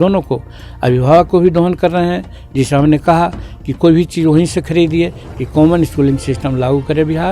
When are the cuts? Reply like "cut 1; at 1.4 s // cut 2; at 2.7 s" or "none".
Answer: cut 1; at 5.2 s